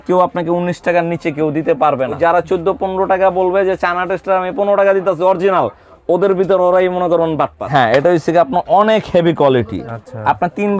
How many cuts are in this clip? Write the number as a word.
two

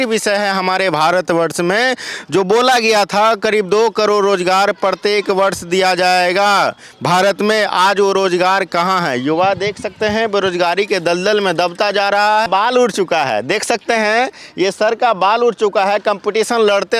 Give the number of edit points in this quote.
zero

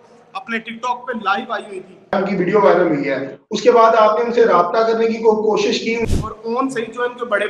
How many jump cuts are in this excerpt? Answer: two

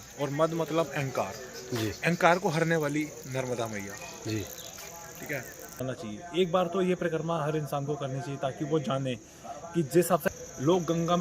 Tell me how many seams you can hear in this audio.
two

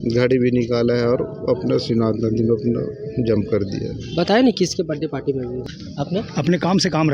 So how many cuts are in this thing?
one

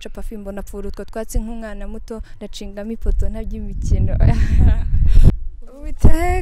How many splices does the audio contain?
one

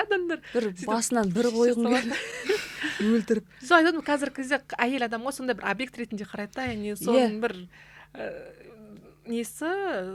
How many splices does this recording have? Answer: zero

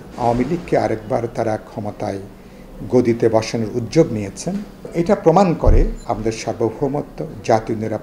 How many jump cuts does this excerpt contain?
two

